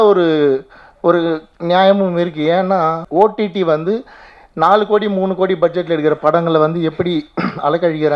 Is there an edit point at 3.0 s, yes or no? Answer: yes